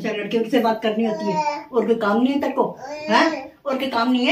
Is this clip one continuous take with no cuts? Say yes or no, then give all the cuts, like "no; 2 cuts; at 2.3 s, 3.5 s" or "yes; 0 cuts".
yes; 0 cuts